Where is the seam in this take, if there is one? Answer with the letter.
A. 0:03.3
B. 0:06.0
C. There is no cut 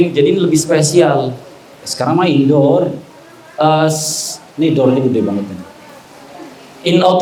C